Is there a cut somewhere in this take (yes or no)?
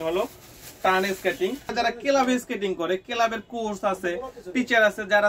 yes